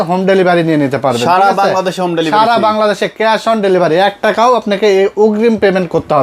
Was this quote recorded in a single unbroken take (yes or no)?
yes